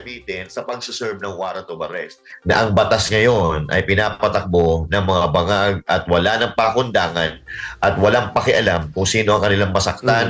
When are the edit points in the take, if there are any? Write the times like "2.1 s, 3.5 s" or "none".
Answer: 2.3 s